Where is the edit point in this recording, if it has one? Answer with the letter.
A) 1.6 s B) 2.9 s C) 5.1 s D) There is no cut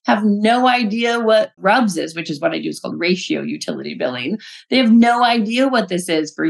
A